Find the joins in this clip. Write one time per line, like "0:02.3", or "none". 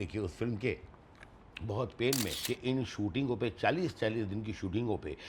0:02.4